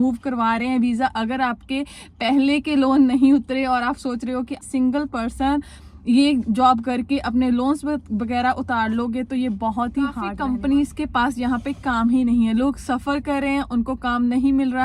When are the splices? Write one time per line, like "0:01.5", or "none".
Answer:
0:04.6
0:10.3